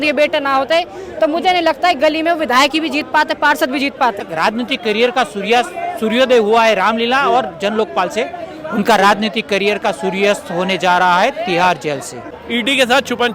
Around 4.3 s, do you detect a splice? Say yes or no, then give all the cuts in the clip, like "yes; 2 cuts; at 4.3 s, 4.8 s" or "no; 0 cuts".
yes; 2 cuts; at 4.3 s, 12.4 s